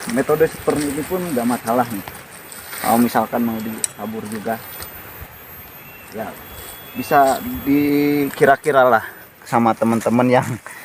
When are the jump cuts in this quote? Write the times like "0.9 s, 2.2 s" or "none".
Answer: none